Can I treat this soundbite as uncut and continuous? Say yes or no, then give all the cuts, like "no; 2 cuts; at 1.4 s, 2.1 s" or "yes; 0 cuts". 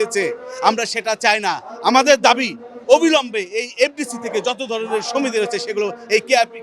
yes; 0 cuts